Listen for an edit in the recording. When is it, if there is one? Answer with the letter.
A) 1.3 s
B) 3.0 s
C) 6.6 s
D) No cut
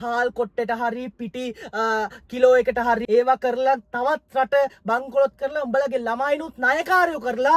B